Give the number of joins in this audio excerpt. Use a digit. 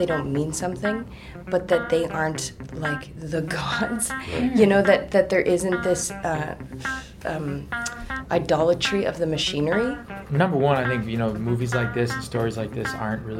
1